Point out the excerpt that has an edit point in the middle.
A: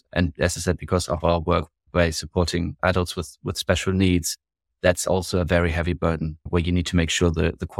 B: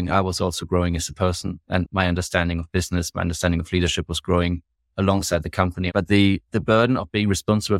B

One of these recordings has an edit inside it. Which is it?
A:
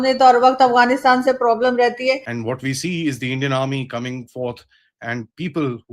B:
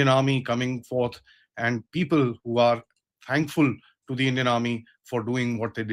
A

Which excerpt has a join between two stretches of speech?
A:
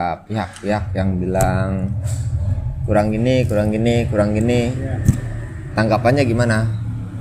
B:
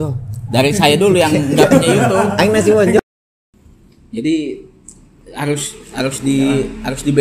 B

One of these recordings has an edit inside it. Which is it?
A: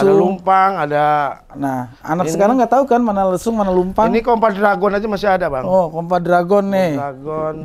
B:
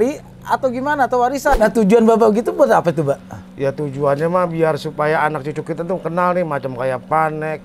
B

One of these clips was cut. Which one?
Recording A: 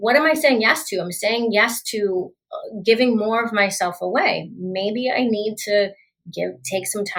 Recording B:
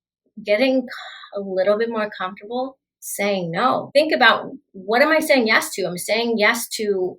B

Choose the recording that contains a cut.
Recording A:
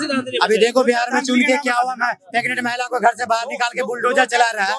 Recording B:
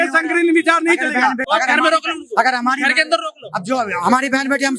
B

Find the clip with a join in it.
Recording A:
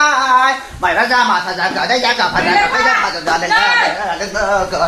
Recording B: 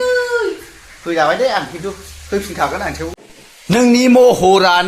B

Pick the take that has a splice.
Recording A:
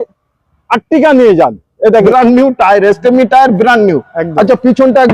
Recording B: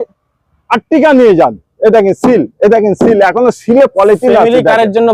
A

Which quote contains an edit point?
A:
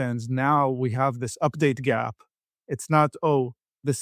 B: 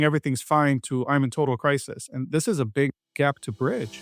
B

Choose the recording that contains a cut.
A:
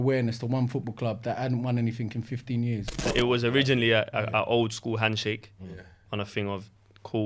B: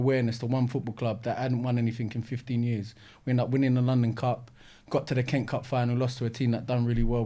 A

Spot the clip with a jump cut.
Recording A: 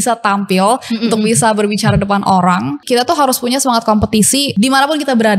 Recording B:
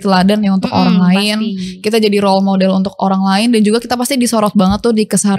A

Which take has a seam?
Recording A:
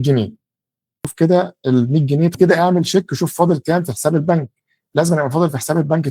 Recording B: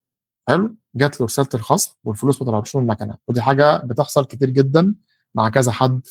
A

